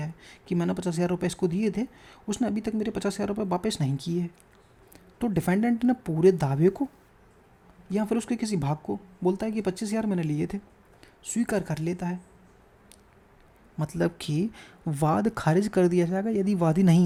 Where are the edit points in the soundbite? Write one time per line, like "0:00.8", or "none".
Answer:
none